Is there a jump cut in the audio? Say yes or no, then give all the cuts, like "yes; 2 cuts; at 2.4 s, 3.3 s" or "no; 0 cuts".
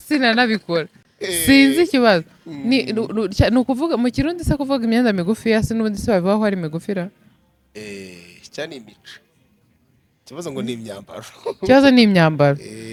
no; 0 cuts